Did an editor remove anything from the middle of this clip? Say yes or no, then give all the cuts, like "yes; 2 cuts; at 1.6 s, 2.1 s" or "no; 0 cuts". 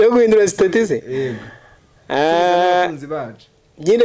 no; 0 cuts